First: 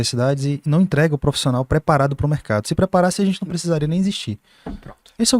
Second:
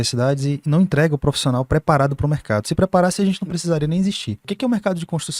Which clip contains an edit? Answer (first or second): second